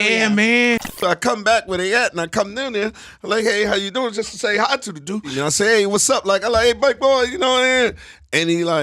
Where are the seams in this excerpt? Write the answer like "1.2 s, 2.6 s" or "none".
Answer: 1.0 s, 5.3 s